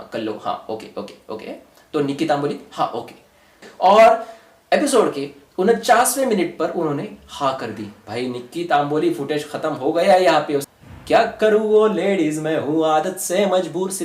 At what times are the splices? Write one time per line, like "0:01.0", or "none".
0:03.7
0:10.7